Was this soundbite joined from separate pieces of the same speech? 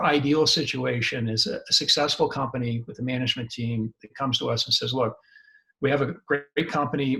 no; 0 cuts

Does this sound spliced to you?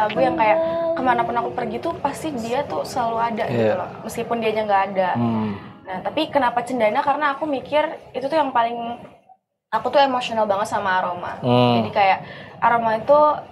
no; 0 cuts

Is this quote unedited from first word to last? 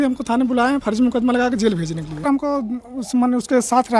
no; 1 cut; at 2.3 s

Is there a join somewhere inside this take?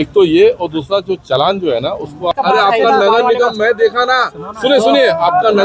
yes; 1 cut; at 2.3 s

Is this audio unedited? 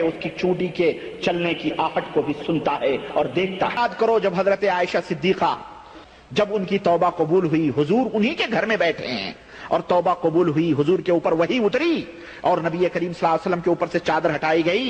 no; 1 cut; at 3.8 s

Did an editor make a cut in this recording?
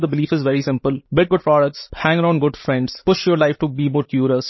yes; 3 cuts; at 1.0 s, 1.9 s, 2.9 s

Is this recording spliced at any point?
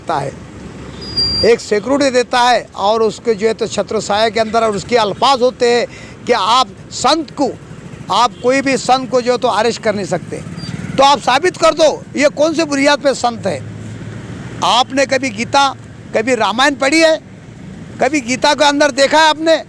no; 0 cuts

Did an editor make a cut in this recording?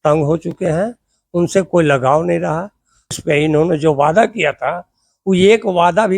yes; 1 cut; at 3.2 s

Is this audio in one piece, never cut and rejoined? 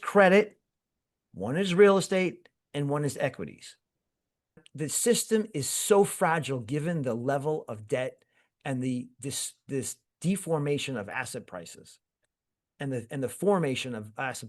no; 1 cut; at 4.7 s

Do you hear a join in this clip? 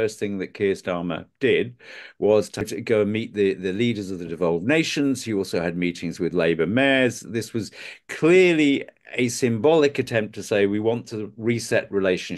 yes; 1 cut; at 2.7 s

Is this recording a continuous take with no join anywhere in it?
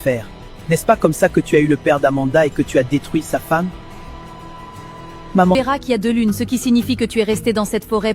no; 1 cut; at 5.5 s

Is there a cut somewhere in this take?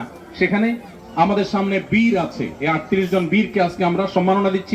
yes; 1 cut; at 0.9 s

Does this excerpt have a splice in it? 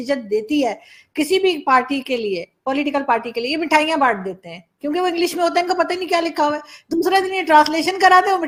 no; 0 cuts

